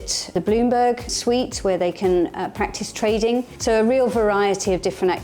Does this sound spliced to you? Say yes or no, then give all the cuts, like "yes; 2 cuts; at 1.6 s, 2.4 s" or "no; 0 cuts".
yes; 1 cut; at 3.5 s